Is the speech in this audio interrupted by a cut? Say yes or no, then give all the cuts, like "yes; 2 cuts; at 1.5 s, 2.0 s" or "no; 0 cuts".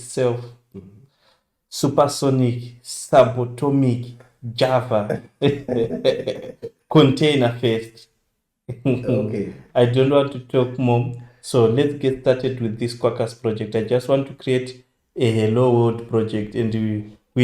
no; 0 cuts